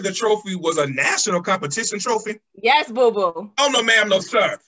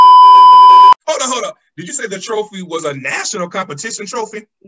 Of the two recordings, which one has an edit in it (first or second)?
second